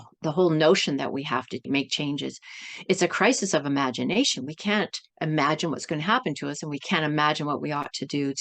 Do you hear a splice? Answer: yes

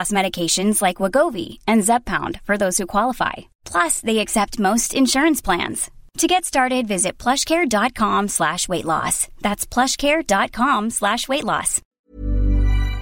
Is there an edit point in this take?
yes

